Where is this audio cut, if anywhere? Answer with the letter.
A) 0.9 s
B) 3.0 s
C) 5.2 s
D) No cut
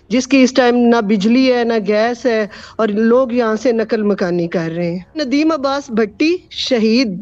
C